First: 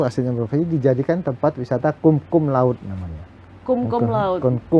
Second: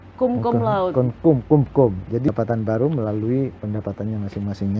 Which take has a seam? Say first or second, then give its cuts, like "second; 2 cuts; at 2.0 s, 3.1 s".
second; 1 cut; at 2.3 s